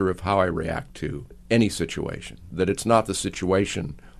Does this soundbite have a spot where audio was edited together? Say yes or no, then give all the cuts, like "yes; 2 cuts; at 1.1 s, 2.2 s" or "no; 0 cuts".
yes; 2 cuts; at 1.3 s, 2.5 s